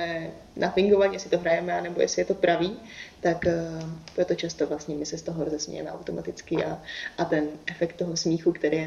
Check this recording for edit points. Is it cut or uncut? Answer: uncut